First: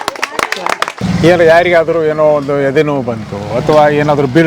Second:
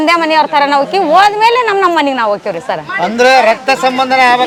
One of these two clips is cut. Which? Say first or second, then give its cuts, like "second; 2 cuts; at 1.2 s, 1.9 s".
first; 1 cut; at 1.0 s